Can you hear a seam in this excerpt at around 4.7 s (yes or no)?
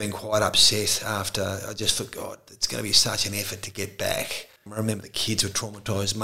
yes